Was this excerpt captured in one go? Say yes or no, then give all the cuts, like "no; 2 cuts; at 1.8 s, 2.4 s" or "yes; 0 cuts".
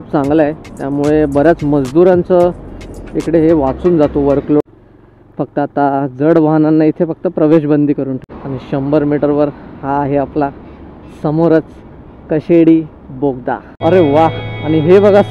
no; 3 cuts; at 4.6 s, 8.3 s, 13.8 s